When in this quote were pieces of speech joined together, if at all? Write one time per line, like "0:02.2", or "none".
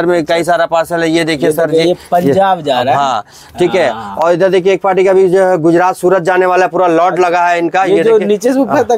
none